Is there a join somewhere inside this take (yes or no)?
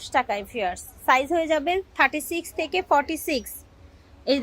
no